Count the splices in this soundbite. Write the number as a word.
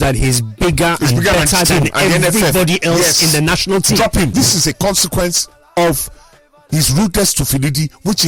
one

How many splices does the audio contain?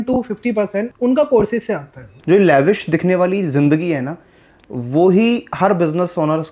two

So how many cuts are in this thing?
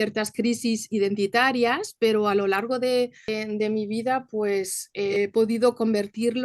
two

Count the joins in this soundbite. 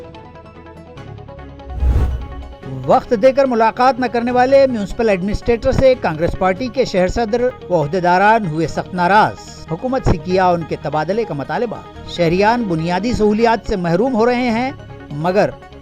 one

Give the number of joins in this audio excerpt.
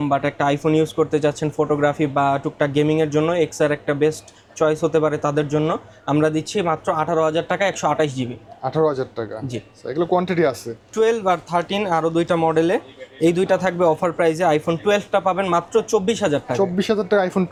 zero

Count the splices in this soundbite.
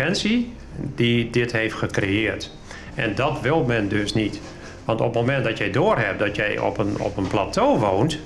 zero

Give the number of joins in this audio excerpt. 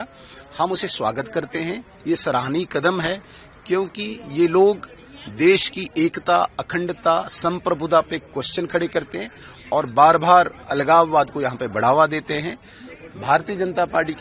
zero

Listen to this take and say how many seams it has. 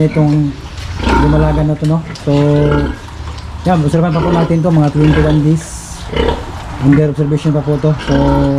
zero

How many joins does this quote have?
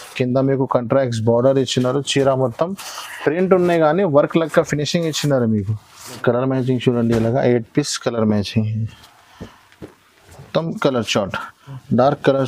one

